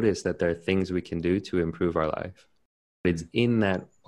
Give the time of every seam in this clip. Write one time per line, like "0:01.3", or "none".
0:03.0